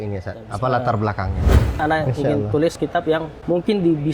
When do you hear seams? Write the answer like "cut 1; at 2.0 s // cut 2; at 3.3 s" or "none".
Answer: cut 1; at 1.8 s // cut 2; at 2.8 s